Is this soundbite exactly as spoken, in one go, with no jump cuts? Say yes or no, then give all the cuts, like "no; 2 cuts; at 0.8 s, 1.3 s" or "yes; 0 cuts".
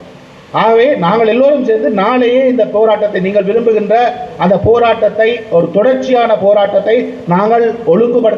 yes; 0 cuts